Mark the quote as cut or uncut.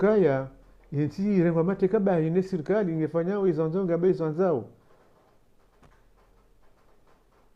uncut